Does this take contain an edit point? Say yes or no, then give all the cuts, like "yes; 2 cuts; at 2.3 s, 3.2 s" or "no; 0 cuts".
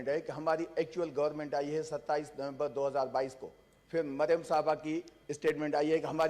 no; 0 cuts